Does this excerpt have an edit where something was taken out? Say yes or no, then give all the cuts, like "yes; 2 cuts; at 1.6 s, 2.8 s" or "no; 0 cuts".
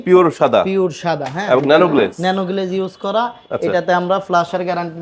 no; 0 cuts